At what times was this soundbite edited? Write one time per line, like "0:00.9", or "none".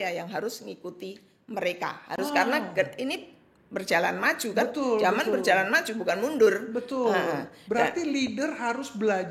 none